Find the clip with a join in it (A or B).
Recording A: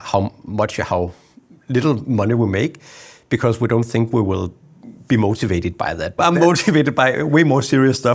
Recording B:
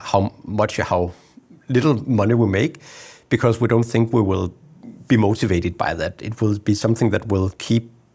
A